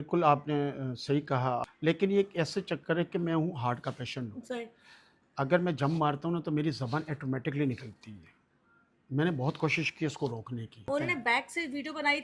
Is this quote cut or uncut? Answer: cut